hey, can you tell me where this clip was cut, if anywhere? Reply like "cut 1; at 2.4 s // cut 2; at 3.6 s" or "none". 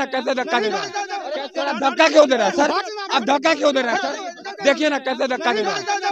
cut 1; at 1.4 s